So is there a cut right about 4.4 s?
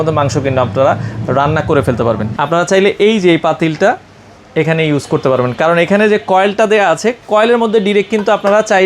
no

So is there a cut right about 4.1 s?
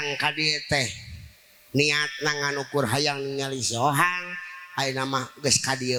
no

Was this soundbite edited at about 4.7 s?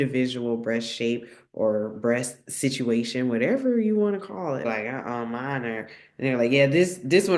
yes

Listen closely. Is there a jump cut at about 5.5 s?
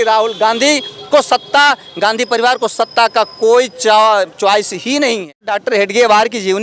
yes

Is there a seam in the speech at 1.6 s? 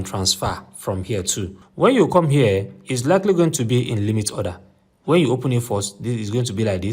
yes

